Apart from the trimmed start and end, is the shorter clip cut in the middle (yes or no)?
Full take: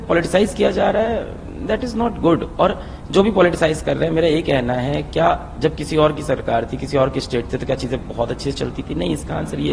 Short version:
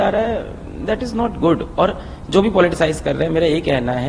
no